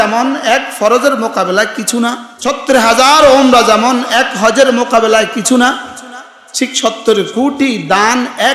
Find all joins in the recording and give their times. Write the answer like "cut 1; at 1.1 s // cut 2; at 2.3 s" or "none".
cut 1; at 2.3 s